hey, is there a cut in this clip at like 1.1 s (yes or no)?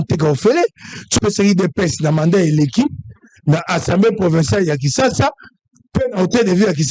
yes